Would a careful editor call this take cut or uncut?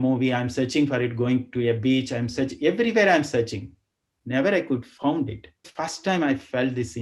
cut